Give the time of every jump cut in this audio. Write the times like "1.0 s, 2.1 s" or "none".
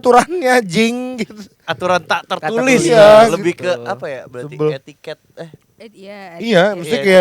none